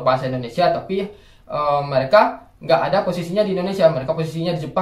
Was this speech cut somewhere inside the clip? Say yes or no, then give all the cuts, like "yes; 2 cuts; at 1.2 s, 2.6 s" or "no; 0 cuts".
no; 0 cuts